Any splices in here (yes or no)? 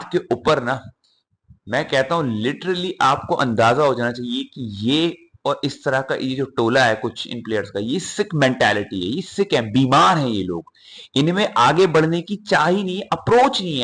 no